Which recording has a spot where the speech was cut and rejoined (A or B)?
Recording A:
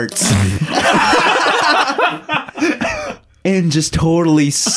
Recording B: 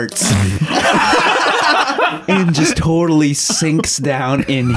B